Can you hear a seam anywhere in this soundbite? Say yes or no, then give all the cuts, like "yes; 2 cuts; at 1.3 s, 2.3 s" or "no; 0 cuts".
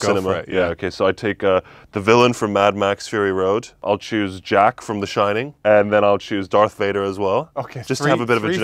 yes; 2 cuts; at 3.8 s, 5.5 s